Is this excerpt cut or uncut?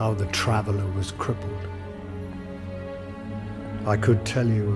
uncut